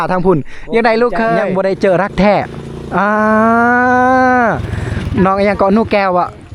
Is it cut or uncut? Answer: cut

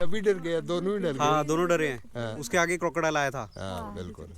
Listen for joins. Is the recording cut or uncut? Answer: uncut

